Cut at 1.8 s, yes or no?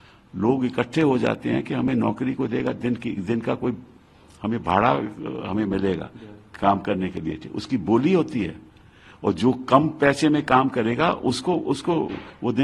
no